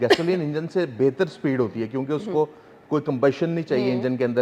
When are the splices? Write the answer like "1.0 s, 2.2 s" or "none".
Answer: none